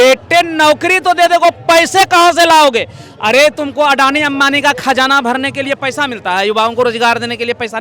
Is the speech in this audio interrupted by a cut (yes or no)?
no